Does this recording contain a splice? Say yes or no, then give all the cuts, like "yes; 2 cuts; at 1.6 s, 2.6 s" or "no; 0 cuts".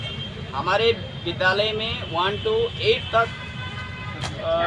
no; 0 cuts